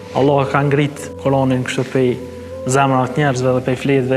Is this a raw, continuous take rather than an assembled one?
no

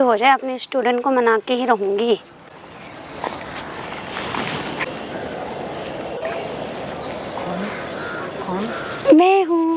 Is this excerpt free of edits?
yes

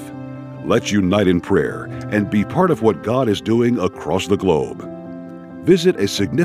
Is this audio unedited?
yes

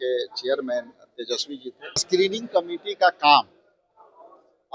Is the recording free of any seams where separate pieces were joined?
no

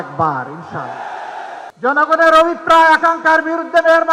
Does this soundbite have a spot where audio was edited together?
yes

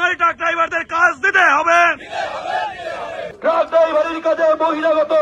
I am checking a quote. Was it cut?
yes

